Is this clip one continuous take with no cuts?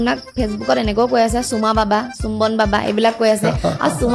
yes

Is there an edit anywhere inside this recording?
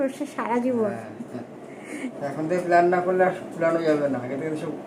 no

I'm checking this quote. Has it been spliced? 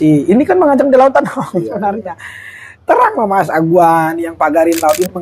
no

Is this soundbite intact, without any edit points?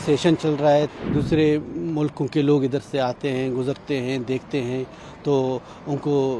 no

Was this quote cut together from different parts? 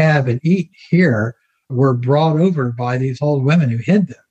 yes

